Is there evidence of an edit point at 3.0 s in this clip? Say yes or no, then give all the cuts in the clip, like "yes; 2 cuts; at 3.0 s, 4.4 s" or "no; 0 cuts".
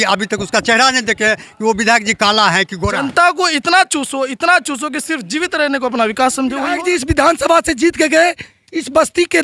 yes; 2 cuts; at 3.0 s, 6.7 s